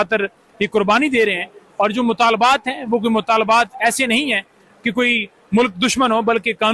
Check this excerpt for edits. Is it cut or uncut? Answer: uncut